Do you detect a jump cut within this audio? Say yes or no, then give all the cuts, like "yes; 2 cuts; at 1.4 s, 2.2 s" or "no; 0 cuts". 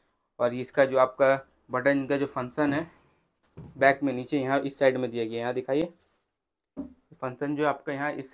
no; 0 cuts